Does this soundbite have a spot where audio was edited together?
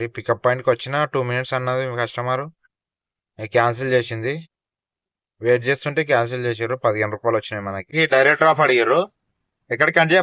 yes; 1 cut; at 7.9 s

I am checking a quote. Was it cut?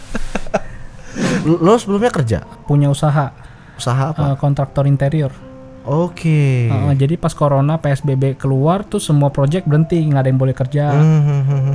yes; 2 cuts; at 1.4 s, 2.5 s

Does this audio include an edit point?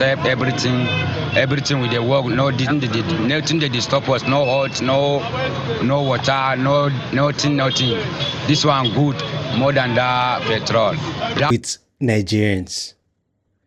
yes; 1 cut; at 11.5 s

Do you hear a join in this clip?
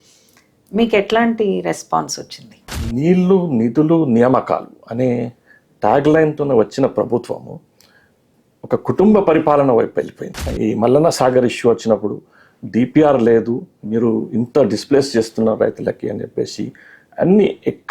yes; 2 cuts; at 2.8 s, 10.5 s

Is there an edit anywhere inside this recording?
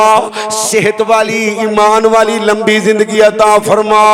no; 0 cuts

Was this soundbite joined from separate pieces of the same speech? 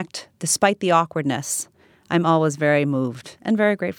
no; 0 cuts

